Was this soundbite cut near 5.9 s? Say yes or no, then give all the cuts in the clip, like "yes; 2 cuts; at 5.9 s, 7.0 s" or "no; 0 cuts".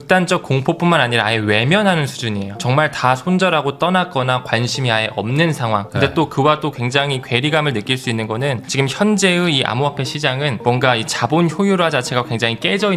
yes; 3 cuts; at 2.6 s, 5.9 s, 8.7 s